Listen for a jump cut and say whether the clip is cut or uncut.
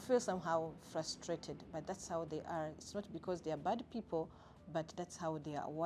uncut